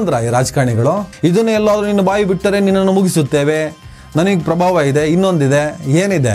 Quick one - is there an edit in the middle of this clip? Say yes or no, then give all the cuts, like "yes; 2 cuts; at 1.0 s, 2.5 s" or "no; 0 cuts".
yes; 1 cut; at 1.1 s